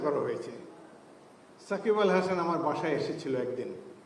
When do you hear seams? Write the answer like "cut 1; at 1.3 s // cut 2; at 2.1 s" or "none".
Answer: none